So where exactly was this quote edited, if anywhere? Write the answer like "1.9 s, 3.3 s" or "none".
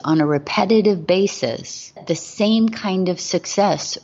2.0 s